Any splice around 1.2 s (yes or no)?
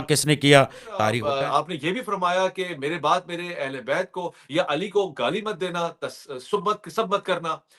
yes